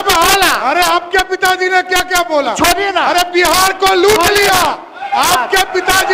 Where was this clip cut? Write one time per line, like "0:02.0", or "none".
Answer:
none